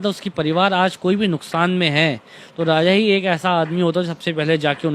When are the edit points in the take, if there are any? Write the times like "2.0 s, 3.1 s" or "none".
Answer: none